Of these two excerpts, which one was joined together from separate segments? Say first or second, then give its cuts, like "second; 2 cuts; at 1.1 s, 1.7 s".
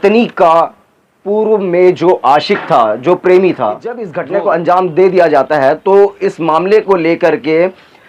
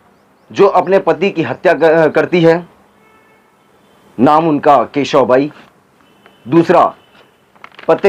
first; 1 cut; at 4.1 s